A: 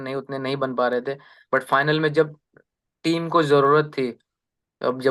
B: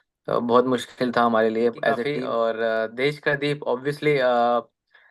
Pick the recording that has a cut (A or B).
B